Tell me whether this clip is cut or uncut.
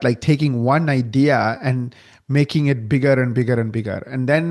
uncut